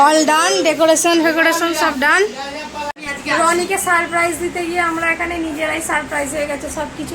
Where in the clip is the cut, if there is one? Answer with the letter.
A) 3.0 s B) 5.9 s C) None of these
A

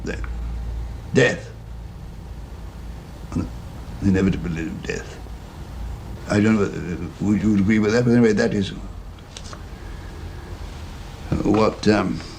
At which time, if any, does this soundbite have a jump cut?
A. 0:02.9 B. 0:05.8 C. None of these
B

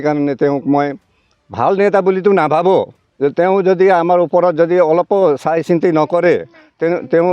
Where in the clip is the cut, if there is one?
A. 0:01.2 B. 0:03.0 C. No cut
B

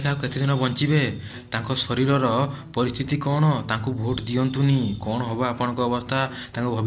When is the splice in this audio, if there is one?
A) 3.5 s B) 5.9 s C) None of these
C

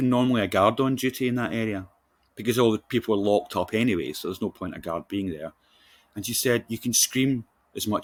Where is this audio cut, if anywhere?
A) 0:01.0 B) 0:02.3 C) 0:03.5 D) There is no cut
D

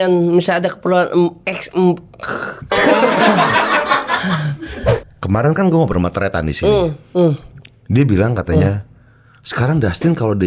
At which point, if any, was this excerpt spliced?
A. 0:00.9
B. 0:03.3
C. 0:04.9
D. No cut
C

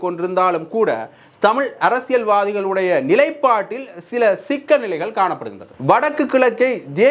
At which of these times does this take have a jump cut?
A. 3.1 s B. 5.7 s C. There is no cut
B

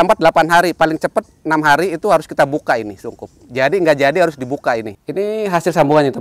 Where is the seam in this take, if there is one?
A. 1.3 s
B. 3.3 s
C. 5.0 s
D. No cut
C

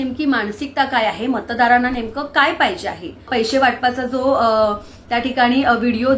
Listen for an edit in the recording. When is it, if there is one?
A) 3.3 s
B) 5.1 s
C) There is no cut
A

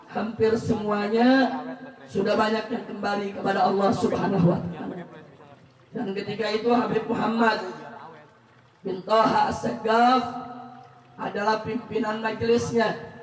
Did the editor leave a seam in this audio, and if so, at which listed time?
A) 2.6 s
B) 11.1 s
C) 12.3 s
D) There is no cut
D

